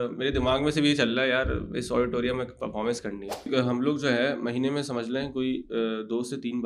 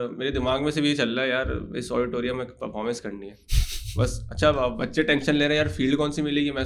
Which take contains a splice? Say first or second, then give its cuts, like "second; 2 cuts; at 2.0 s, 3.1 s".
first; 1 cut; at 3.5 s